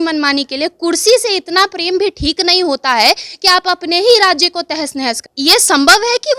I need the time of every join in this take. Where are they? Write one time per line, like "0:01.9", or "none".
0:05.3